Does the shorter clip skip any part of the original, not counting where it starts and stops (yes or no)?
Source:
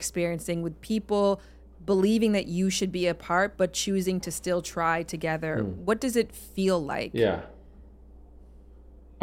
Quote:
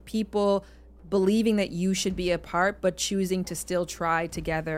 no